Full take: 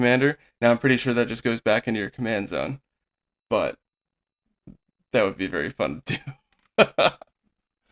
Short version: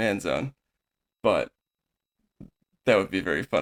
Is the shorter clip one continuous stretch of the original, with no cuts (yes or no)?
yes